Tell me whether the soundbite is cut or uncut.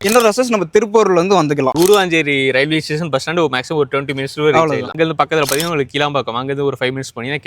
cut